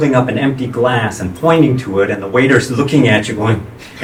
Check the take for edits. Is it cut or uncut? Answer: uncut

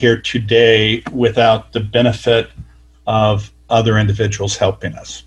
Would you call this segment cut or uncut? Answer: uncut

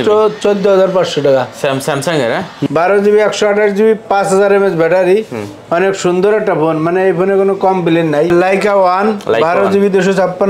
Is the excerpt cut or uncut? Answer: cut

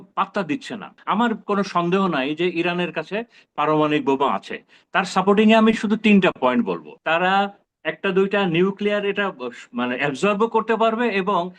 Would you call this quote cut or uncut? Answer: cut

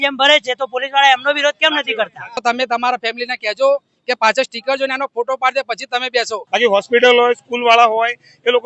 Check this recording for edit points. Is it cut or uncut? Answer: cut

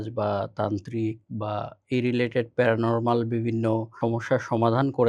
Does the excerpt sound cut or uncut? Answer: cut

